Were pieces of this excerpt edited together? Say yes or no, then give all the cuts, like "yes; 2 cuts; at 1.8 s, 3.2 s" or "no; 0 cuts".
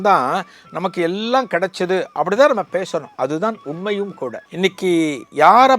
yes; 1 cut; at 4.4 s